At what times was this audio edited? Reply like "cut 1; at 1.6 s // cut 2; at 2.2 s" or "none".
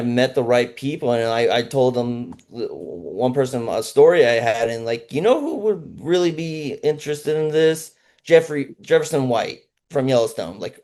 none